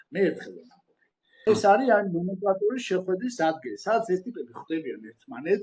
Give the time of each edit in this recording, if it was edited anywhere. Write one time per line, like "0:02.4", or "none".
0:01.4